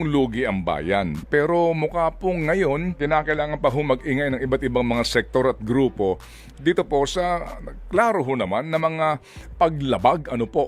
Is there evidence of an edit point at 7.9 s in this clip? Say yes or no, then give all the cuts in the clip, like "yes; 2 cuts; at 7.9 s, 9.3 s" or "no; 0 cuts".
no; 1 cut; at 3.0 s